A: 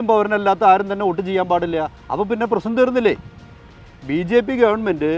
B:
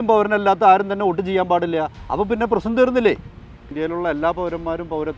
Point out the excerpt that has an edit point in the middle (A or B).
B